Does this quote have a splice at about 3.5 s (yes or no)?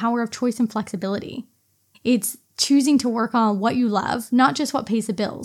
no